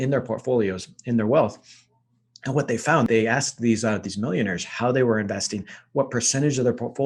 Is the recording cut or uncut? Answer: uncut